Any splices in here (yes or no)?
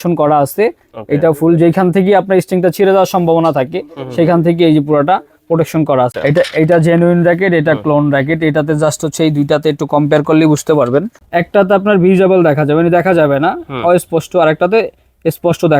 yes